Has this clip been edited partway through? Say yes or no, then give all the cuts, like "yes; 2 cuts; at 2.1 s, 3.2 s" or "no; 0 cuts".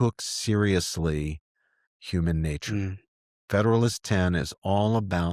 no; 0 cuts